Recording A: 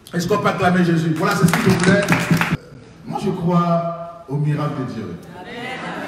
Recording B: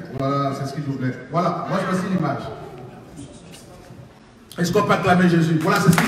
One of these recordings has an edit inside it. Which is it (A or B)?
A